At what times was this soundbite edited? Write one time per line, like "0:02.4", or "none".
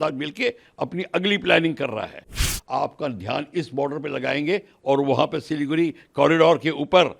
0:02.5